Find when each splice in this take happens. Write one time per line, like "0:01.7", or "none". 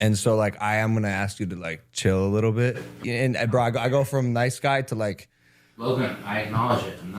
0:02.9